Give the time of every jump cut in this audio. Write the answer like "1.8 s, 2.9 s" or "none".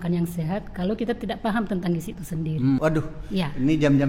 2.8 s